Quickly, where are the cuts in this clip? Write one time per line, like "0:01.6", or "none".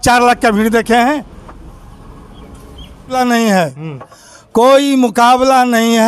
0:03.1